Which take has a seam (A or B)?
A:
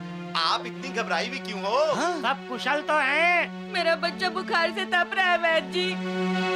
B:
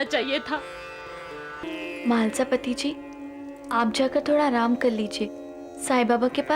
B